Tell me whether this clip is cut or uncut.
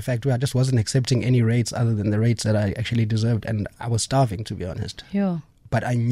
uncut